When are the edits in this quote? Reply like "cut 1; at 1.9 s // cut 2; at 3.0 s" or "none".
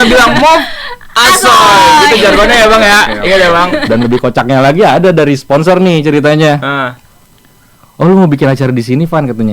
cut 1; at 3.8 s